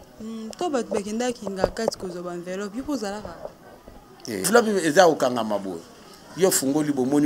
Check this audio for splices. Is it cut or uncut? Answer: cut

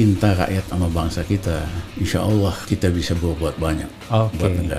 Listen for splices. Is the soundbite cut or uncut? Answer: cut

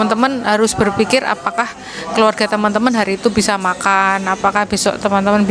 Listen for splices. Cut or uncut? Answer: uncut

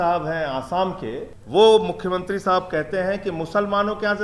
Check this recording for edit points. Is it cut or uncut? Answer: cut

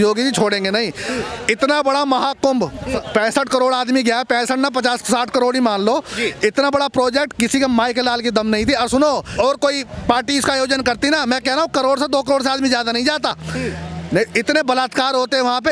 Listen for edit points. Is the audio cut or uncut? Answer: uncut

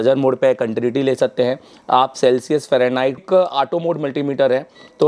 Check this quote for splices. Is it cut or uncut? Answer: cut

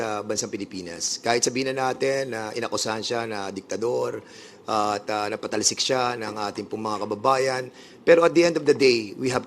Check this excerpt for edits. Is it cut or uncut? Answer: uncut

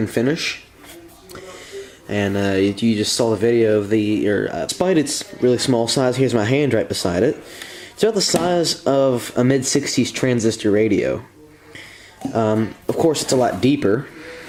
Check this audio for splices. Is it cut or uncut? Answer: uncut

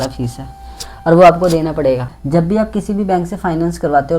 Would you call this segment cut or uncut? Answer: cut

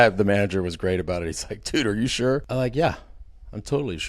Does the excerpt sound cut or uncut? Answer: cut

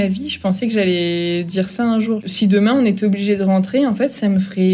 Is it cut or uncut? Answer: cut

